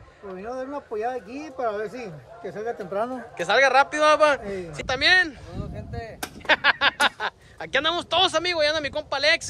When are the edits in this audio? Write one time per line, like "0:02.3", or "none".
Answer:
0:04.8

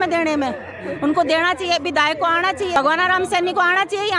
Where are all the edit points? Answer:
0:02.8

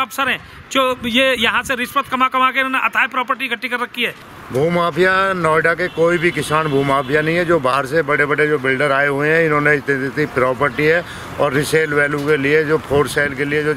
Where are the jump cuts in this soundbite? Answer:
0:04.3

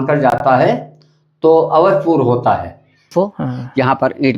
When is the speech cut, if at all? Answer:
0:03.1

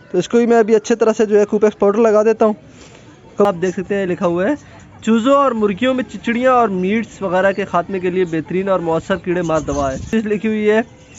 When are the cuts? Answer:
0:03.5
0:10.1

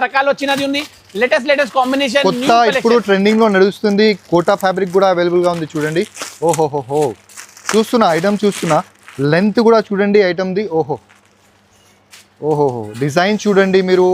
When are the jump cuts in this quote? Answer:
none

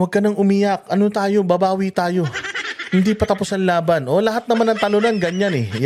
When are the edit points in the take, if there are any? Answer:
none

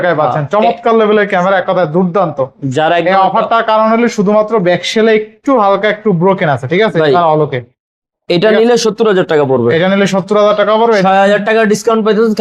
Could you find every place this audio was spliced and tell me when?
none

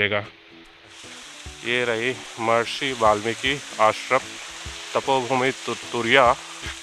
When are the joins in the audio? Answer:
0:01.0

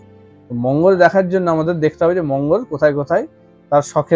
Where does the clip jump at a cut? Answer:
none

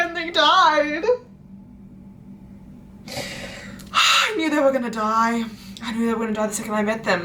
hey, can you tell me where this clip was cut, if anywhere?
none

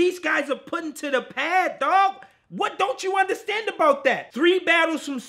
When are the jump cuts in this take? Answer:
0:04.3

